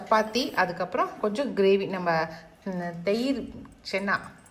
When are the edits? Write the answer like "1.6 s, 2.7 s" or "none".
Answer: none